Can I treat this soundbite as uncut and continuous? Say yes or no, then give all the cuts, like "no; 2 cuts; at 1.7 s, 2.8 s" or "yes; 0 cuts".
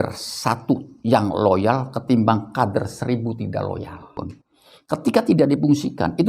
no; 1 cut; at 4.2 s